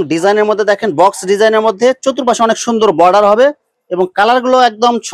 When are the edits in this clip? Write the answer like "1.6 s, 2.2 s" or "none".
none